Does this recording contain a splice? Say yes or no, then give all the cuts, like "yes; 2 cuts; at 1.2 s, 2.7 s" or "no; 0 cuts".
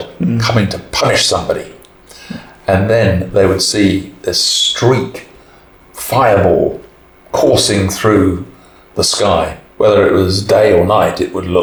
no; 0 cuts